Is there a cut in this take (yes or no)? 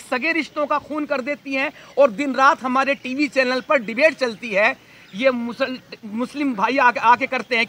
no